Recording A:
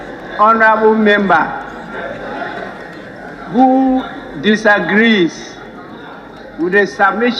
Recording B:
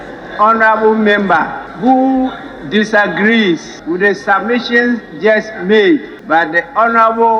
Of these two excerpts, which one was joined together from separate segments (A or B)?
B